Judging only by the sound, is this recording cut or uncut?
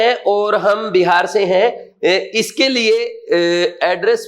uncut